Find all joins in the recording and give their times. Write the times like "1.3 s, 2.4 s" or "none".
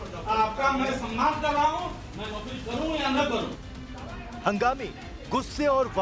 3.5 s